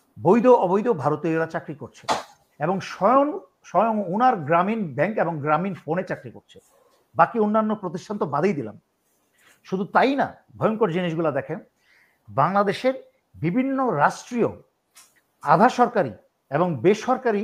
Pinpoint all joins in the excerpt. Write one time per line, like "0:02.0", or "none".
none